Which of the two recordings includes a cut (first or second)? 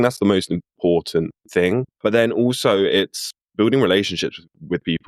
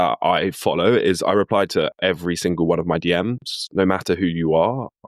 first